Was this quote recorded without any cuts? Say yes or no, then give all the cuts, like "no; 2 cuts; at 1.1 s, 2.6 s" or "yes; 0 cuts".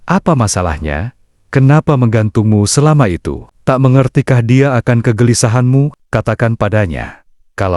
no; 1 cut; at 6.0 s